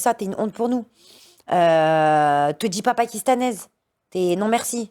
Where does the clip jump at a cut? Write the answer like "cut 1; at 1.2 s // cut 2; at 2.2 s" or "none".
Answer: none